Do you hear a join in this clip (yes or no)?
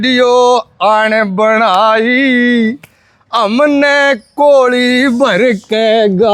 no